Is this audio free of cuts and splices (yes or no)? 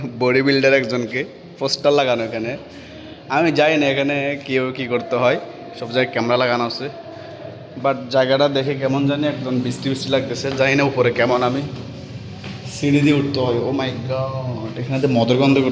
yes